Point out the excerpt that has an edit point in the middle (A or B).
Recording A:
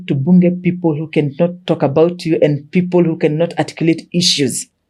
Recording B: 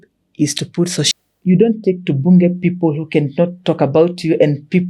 B